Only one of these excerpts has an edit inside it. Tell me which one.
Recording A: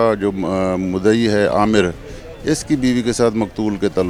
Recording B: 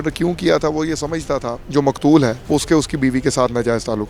B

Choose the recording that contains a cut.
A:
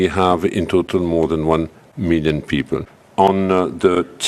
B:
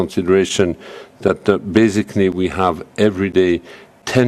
A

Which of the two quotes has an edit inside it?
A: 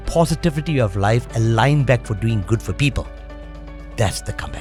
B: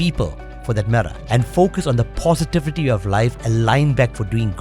B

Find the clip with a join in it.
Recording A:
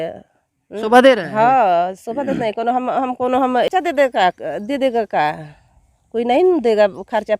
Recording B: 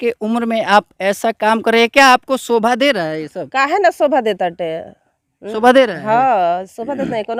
A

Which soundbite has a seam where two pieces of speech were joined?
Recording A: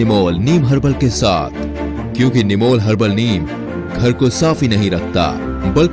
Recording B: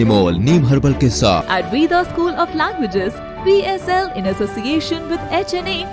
B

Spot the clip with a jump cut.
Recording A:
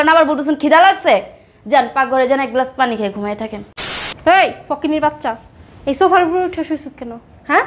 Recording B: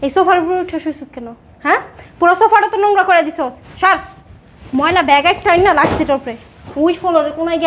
A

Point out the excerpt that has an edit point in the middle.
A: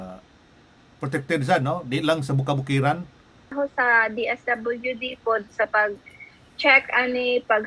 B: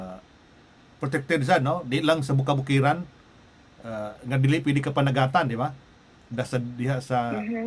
A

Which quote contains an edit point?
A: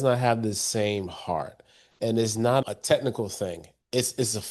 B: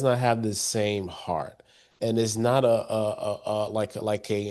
A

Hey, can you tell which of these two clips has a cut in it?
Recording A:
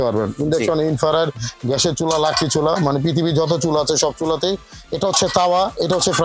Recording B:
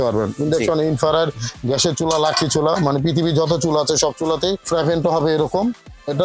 B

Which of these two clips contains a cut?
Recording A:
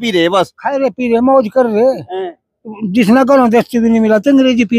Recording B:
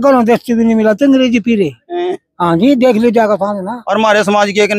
B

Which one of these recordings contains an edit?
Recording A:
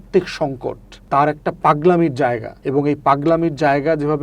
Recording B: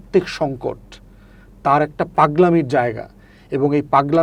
A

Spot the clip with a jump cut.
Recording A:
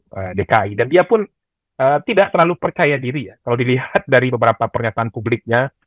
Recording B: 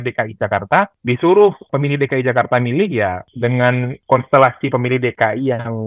B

